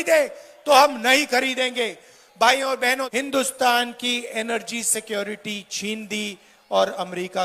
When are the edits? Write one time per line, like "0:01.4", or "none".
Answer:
0:03.1